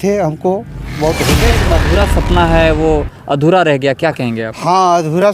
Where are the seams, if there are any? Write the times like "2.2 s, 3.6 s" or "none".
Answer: 1.7 s